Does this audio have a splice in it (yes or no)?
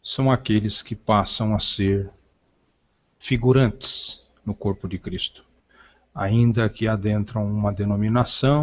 yes